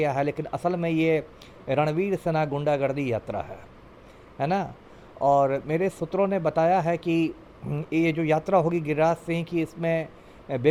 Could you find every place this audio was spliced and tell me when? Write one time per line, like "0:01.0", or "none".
none

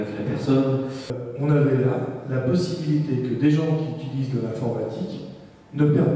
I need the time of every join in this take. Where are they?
0:01.2

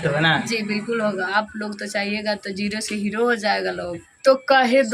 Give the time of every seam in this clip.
0:01.3
0:04.1

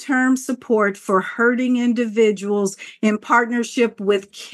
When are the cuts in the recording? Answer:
none

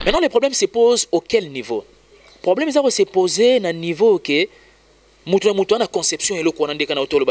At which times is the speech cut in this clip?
none

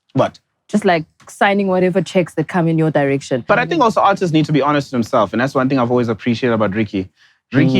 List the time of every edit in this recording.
0:03.4

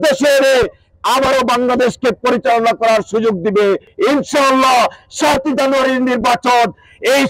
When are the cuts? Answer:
0:03.9

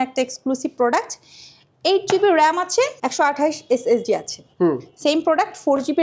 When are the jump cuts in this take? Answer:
none

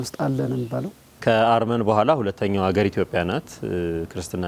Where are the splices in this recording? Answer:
0:01.0

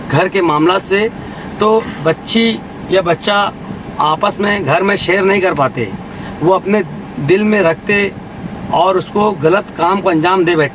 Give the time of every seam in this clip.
none

